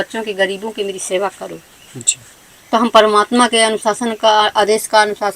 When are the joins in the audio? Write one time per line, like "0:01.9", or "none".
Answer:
none